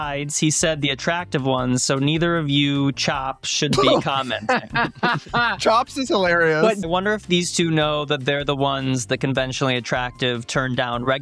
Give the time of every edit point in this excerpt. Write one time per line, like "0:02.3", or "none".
0:06.8